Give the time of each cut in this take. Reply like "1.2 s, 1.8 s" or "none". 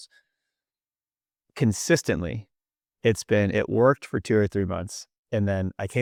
none